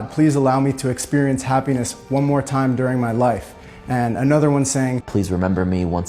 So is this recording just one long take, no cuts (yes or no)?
yes